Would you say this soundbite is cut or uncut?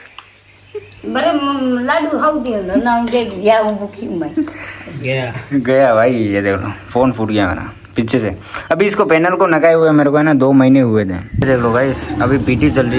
cut